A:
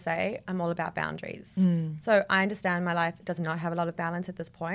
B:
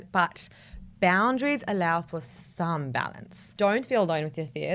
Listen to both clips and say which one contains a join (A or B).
B